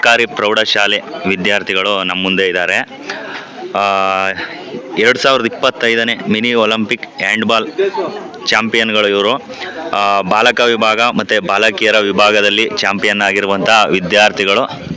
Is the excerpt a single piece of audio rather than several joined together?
yes; 0 cuts

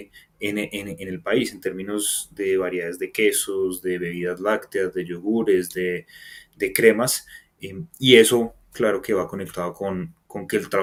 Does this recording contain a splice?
no; 0 cuts

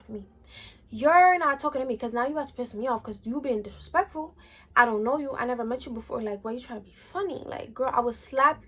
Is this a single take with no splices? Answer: yes; 0 cuts

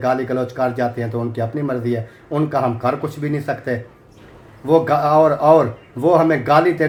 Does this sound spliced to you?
no; 0 cuts

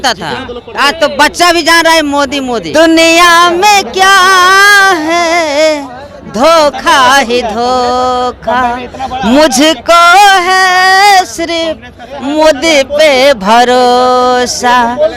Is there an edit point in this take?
yes; 1 cut; at 2.7 s

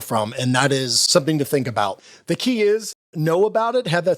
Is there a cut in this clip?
yes; 3 cuts; at 1.0 s, 2.0 s, 3.1 s

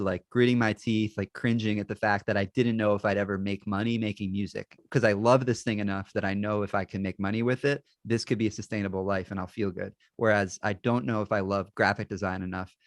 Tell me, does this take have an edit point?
yes; 1 cut; at 4.8 s

